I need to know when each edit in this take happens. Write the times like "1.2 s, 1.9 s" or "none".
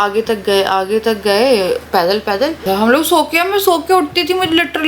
2.6 s